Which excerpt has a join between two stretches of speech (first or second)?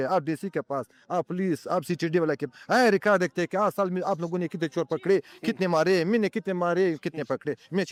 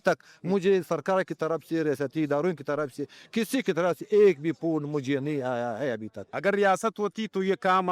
second